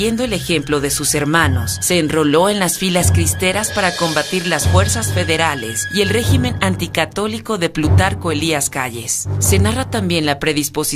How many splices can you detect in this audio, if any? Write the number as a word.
one